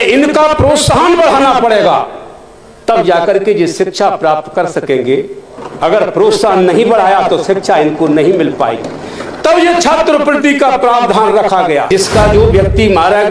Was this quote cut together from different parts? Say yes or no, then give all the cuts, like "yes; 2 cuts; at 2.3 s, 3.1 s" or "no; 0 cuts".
yes; 1 cut; at 11.9 s